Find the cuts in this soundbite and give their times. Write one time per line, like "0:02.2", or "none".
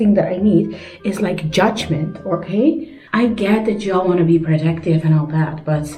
0:02.9